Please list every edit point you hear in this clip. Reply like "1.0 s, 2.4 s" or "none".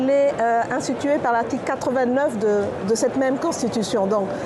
none